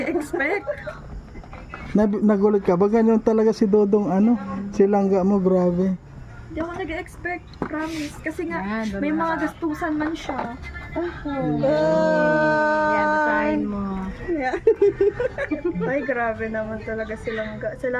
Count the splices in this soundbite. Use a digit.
0